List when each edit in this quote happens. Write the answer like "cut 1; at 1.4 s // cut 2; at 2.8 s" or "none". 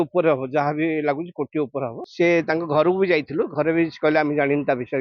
cut 1; at 2.0 s